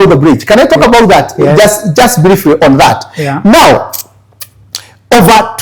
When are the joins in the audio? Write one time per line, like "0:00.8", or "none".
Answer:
none